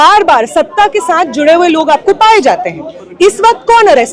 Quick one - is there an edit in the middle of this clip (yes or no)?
no